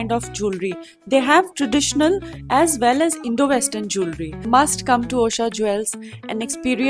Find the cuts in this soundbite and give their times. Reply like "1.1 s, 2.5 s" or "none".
4.4 s